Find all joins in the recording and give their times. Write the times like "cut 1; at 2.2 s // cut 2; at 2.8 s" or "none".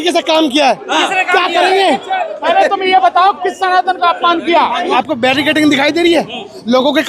cut 1; at 2.3 s // cut 2; at 4.8 s